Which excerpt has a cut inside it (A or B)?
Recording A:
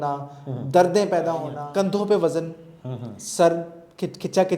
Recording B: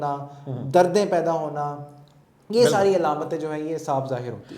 A